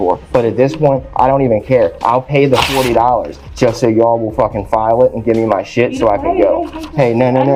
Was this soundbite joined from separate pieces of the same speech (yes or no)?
no